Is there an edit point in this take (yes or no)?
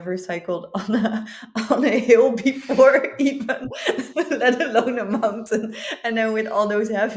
no